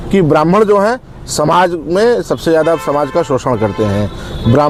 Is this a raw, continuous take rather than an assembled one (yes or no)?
yes